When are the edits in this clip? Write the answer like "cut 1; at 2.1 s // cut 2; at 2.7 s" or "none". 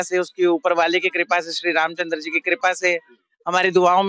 none